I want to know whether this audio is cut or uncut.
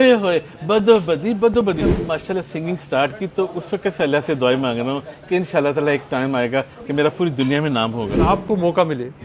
cut